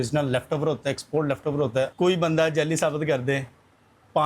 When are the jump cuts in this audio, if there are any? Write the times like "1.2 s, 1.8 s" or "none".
1.9 s